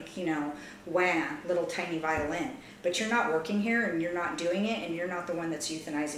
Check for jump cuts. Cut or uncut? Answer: uncut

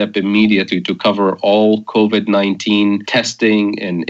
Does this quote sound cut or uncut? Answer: cut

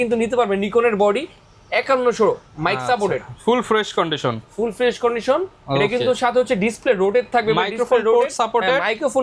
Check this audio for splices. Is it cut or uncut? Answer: uncut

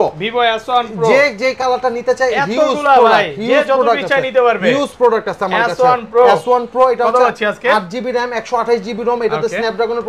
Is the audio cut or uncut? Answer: uncut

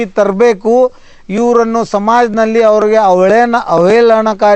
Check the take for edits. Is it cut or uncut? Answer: uncut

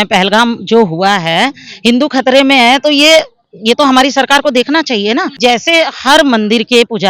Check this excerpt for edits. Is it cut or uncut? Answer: cut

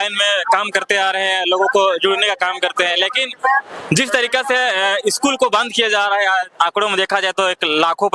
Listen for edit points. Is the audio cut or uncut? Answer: uncut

